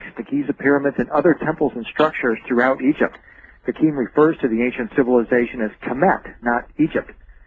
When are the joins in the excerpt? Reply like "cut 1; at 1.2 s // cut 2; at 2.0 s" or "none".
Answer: none